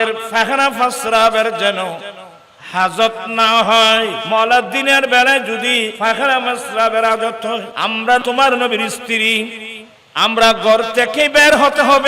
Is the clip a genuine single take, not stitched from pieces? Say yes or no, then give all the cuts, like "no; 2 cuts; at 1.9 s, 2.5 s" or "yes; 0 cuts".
no; 3 cuts; at 4.2 s, 5.9 s, 8.1 s